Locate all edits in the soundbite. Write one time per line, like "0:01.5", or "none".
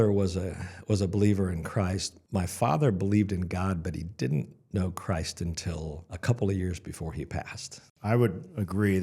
0:02.1
0:06.1
0:07.9